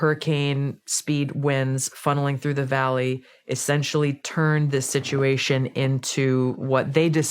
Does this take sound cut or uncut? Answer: uncut